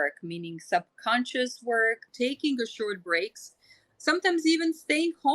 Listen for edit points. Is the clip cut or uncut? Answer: cut